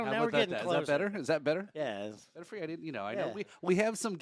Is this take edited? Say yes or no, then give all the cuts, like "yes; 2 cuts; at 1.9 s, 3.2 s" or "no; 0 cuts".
no; 0 cuts